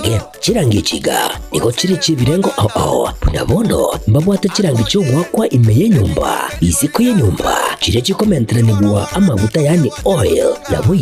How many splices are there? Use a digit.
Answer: 1